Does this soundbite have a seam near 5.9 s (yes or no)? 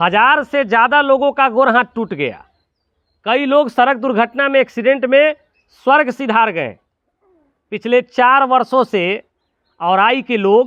no